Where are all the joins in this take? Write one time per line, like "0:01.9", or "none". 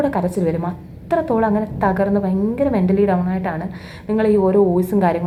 none